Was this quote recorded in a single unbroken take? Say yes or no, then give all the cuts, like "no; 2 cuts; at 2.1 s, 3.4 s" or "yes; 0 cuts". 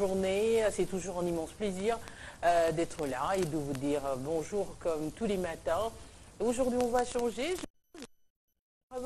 no; 1 cut; at 5.5 s